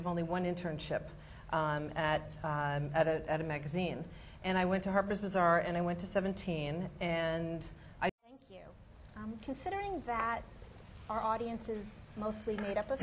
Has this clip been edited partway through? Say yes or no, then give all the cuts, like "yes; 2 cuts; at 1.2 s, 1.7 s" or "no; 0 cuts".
no; 0 cuts